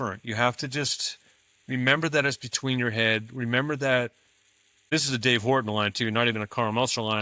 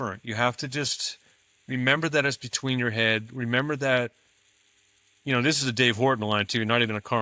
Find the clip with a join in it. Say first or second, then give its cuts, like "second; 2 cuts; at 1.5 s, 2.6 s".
first; 1 cut; at 4.9 s